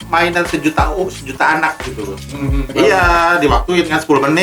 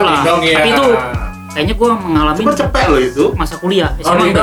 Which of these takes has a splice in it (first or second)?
first